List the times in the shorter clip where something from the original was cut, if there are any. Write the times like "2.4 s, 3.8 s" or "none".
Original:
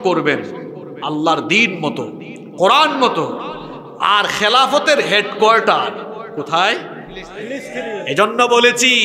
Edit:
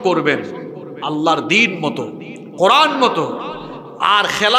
none